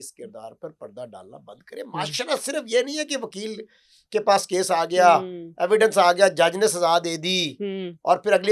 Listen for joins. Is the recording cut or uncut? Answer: uncut